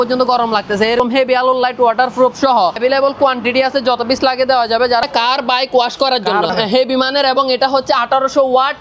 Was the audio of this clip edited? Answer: yes; 4 cuts; at 1.0 s, 2.8 s, 5.0 s, 6.5 s

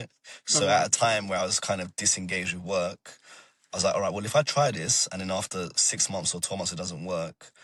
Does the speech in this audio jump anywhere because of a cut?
no; 0 cuts

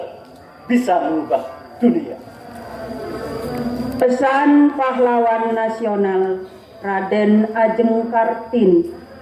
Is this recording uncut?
no; 1 cut; at 2.6 s

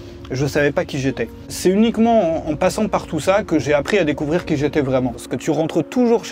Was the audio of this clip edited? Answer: yes; 2 cuts; at 1.5 s, 5.3 s

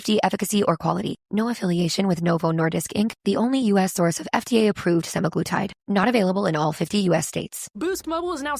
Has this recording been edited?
yes; 1 cut; at 7.6 s

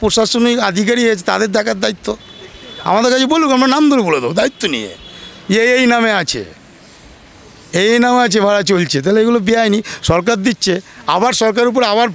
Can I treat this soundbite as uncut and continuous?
yes; 0 cuts

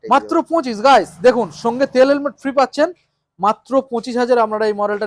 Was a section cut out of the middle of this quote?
no; 0 cuts

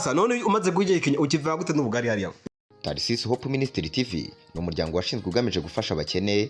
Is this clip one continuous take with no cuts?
no; 1 cut; at 2.3 s

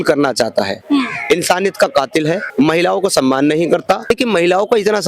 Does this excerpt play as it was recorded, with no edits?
no; 2 cuts; at 2.4 s, 4.0 s

